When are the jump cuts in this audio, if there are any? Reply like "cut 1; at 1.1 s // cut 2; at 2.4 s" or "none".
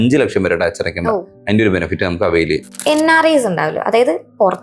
cut 1; at 2.7 s